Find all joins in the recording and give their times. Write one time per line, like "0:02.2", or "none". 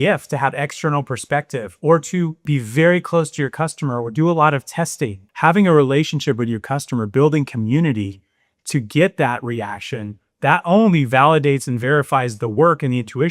0:02.4
0:05.2